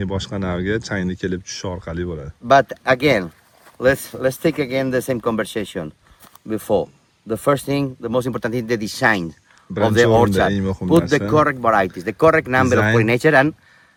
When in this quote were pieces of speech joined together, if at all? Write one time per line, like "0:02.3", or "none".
none